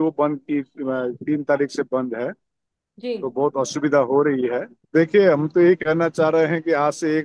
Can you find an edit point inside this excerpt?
yes; 1 cut; at 4.7 s

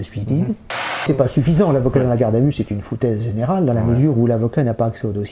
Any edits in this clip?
yes; 1 cut; at 1.0 s

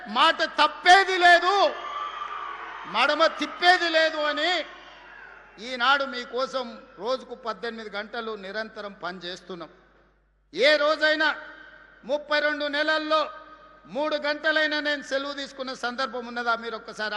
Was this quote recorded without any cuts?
yes; 0 cuts

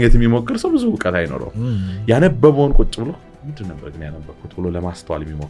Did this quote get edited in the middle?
no; 0 cuts

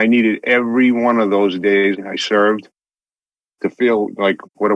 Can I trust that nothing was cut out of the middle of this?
no; 1 cut; at 2.0 s

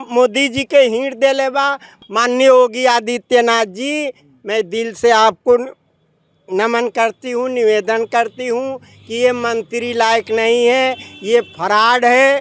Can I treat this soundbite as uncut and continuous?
no; 1 cut; at 1.9 s

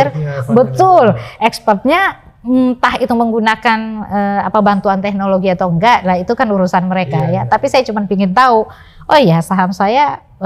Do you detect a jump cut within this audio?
no; 0 cuts

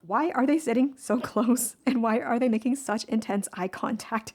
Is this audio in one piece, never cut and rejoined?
yes; 0 cuts

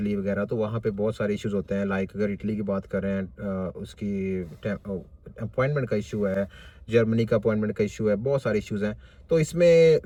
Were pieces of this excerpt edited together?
no; 0 cuts

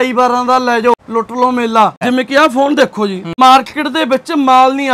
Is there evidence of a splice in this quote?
yes; 3 cuts; at 0.9 s, 2.0 s, 3.3 s

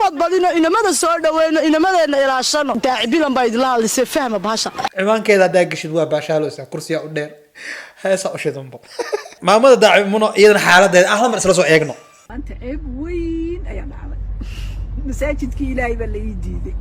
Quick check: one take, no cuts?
no; 2 cuts; at 4.8 s, 9.2 s

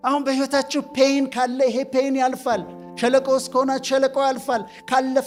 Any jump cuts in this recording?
no; 0 cuts

